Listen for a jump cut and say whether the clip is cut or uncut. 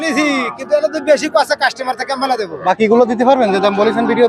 cut